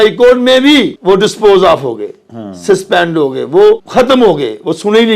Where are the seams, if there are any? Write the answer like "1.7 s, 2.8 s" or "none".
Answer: 0.9 s, 3.9 s